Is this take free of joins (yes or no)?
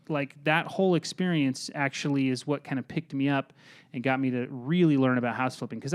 yes